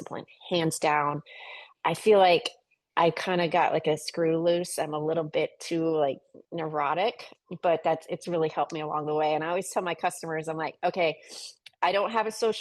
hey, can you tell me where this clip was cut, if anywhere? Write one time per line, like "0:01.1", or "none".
0:07.3